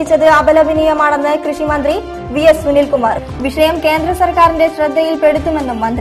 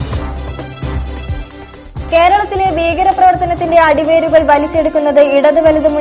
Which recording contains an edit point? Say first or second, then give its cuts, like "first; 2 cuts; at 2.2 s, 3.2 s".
second; 1 cut; at 1.4 s